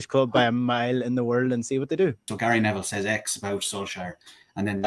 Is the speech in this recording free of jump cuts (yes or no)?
no